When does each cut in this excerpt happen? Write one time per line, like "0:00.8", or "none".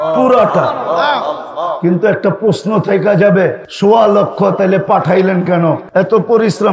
0:03.7
0:05.8